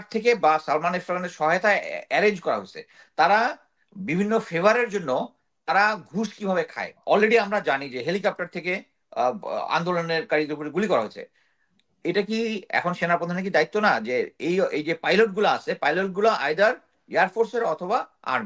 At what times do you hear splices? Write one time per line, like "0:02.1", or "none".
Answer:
0:06.9